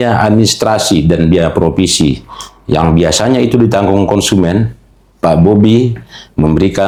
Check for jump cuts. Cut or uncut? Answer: uncut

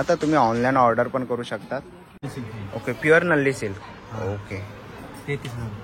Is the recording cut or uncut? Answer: cut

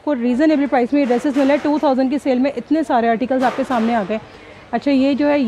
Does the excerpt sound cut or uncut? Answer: uncut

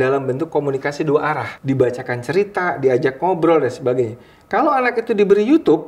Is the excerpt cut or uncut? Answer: cut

